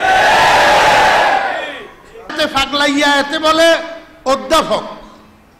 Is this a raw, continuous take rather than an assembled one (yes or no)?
no